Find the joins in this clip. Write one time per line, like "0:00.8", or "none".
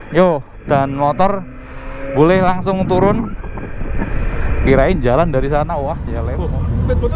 0:06.1